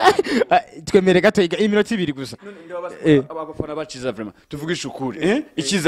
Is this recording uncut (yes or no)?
yes